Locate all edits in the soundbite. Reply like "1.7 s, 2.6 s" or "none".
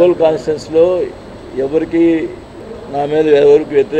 none